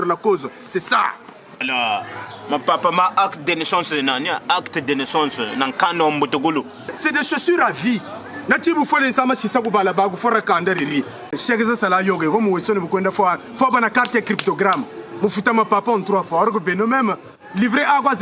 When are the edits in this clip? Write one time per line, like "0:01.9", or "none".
0:01.6
0:07.0
0:11.4